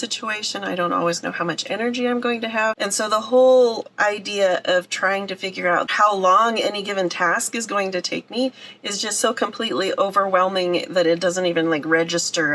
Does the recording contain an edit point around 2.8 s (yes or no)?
yes